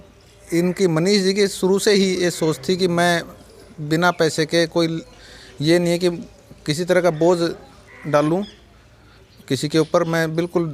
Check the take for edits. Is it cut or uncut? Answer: uncut